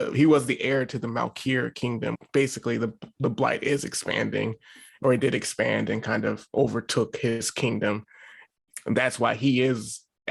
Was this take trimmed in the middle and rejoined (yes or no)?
yes